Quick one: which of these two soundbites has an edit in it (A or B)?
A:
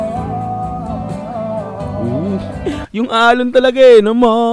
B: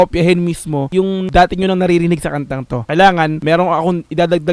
B